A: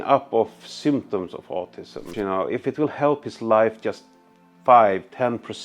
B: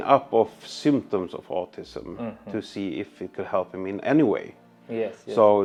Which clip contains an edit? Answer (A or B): A